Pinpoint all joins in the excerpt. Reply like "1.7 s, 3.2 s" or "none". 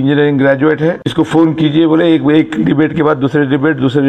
1.0 s